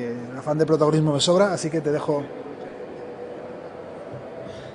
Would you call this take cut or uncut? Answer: cut